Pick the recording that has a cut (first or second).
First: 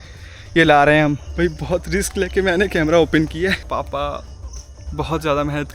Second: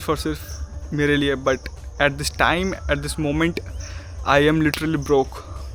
first